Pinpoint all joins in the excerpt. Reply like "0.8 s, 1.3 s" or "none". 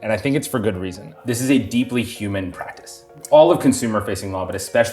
1.1 s, 3.1 s